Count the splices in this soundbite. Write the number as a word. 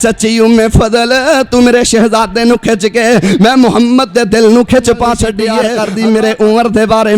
one